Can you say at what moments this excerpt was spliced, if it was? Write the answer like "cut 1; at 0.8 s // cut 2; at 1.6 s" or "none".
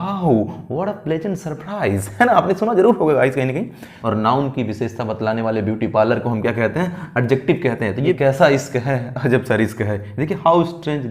cut 1; at 3.9 s // cut 2; at 8.2 s